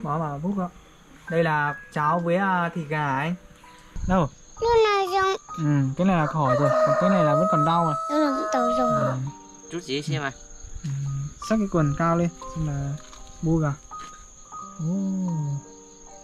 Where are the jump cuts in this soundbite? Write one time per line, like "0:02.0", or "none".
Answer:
0:04.0